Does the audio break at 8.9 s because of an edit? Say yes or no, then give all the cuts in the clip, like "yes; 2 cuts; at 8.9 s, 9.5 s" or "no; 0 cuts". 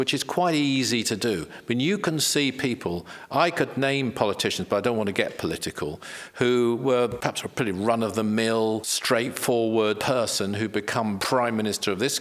yes; 4 cuts; at 7.2 s, 8.9 s, 10.0 s, 11.2 s